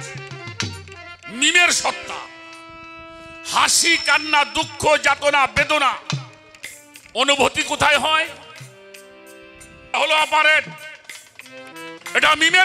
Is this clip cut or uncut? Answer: cut